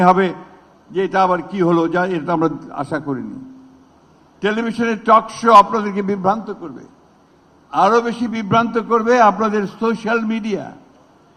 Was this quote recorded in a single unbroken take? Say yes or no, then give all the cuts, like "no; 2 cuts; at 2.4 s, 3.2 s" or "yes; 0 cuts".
yes; 0 cuts